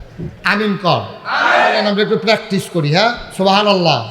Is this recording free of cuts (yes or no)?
no